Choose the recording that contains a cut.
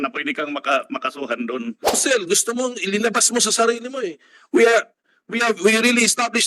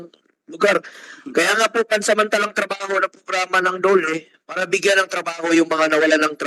first; 1 cut; at 2.0 s

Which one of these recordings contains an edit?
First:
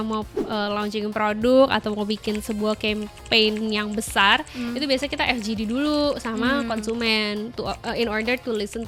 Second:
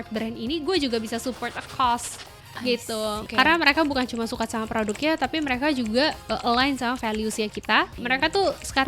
second; 2 cuts; at 3.2 s, 8.0 s

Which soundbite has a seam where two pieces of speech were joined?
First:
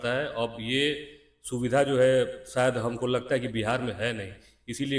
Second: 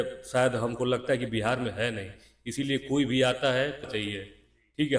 second; 1 cut; at 3.8 s

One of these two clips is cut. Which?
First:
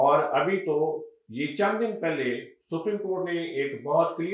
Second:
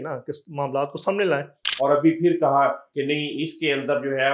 second; 1 cut; at 1.6 s

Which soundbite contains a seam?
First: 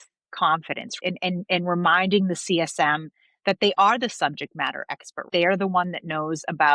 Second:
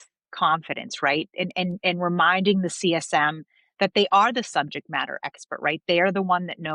first; 2 cuts; at 0.9 s, 5.2 s

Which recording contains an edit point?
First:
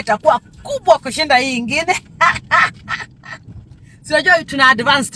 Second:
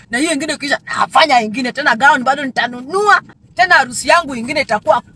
second; 1 cut; at 3.4 s

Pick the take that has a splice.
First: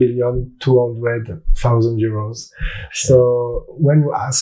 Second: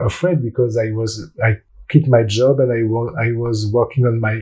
second; 1 cut; at 1.7 s

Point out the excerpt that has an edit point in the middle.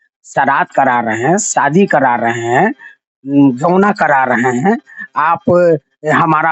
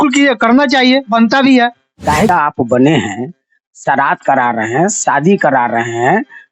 second; 1 cut; at 2.3 s

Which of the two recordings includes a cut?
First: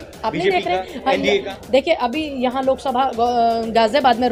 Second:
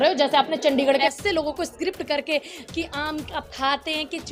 second; 1 cut; at 1.0 s

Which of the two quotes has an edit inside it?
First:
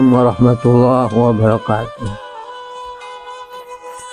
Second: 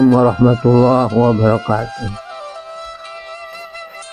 first; 1 cut; at 2.2 s

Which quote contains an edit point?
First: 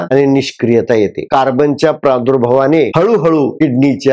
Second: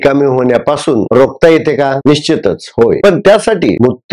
first; 1 cut; at 1.2 s

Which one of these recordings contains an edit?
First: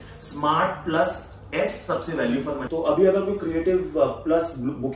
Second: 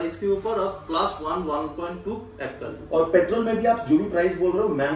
first; 1 cut; at 2.6 s

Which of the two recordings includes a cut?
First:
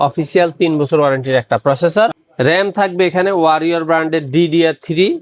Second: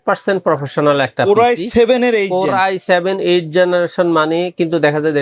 first; 1 cut; at 2.2 s

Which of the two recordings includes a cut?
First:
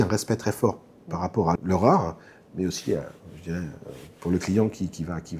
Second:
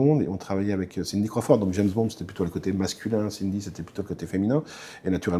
first; 1 cut; at 1.5 s

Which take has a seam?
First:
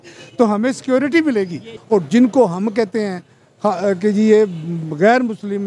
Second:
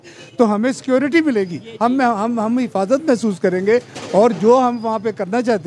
first; 1 cut; at 1.7 s

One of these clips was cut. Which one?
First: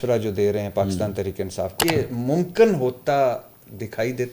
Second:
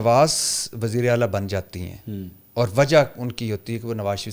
first; 1 cut; at 1.8 s

